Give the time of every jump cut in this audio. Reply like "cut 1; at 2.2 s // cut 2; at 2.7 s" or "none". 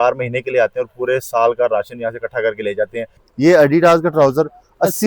cut 1; at 3.2 s